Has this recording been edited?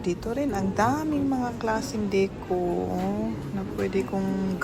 no; 0 cuts

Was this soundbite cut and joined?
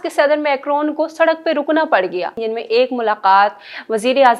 yes; 1 cut; at 2.4 s

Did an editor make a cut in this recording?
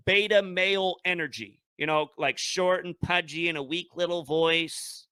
no; 0 cuts

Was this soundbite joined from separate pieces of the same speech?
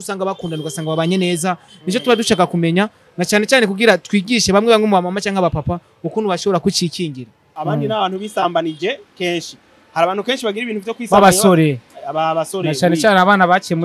yes; 1 cut; at 7.5 s

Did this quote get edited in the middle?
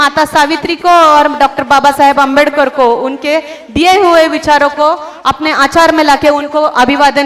no; 0 cuts

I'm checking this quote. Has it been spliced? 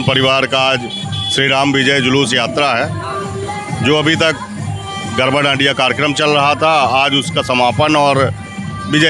no; 0 cuts

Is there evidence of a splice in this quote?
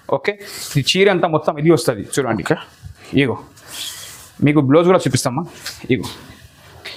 no; 0 cuts

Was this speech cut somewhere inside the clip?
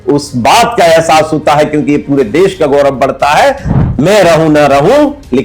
yes; 1 cut; at 3.7 s

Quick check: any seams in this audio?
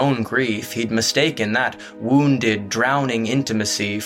no; 0 cuts

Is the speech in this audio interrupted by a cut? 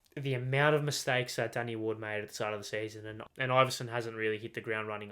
yes; 1 cut; at 3.1 s

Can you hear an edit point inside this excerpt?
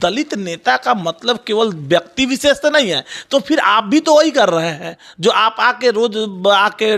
no; 0 cuts

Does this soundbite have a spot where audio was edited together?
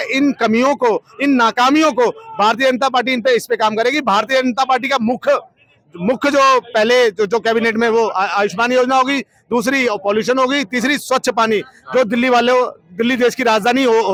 no; 0 cuts

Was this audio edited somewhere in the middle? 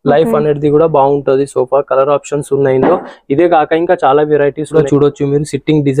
yes; 1 cut; at 4.7 s

